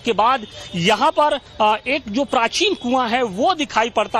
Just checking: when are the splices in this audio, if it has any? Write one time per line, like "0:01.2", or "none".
0:03.1